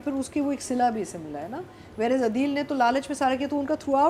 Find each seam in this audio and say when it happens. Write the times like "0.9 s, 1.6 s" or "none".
none